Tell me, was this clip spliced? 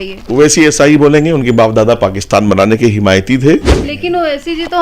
yes; 1 cut; at 3.8 s

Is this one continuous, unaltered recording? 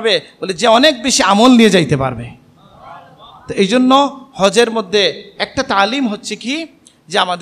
yes; 0 cuts

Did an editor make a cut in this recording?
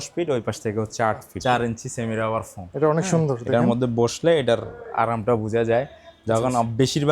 yes; 1 cut; at 1.3 s

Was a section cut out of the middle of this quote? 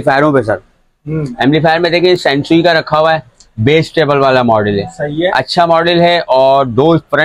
no; 0 cuts

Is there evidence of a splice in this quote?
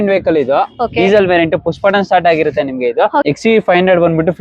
yes; 1 cut; at 3.2 s

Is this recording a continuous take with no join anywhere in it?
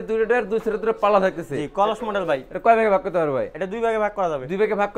yes; 0 cuts

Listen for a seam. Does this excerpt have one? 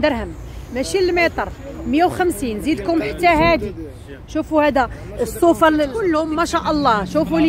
yes; 1 cut; at 6.0 s

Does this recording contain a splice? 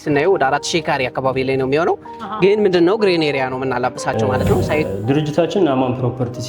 yes; 1 cut; at 4.9 s

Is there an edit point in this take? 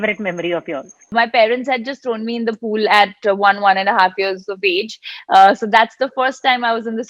yes; 1 cut; at 1.1 s

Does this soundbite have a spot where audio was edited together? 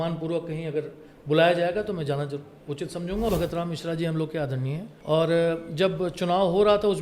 yes; 2 cuts; at 3.3 s, 4.9 s

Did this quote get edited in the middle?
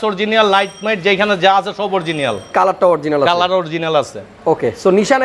no; 0 cuts

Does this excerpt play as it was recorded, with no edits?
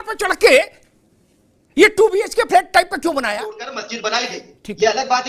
no; 1 cut; at 3.8 s

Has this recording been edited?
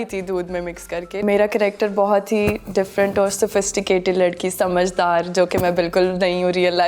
yes; 1 cut; at 1.2 s

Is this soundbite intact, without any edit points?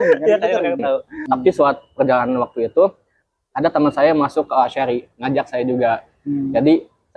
no; 1 cut; at 1.1 s

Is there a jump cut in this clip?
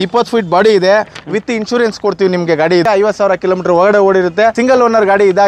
yes; 2 cuts; at 2.8 s, 4.6 s

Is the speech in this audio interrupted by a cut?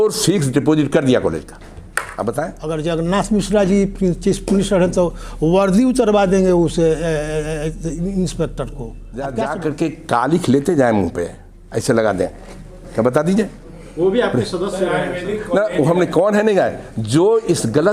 yes; 2 cuts; at 2.6 s, 9.3 s

